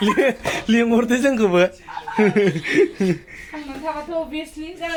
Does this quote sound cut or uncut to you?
uncut